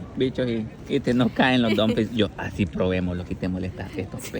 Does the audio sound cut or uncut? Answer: uncut